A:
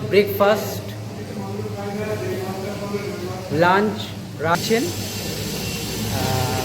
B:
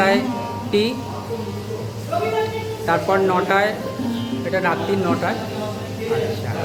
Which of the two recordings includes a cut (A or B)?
A